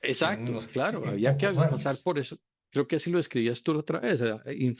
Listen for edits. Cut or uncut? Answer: uncut